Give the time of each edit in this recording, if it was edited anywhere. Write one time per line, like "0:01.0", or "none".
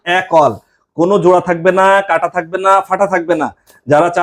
none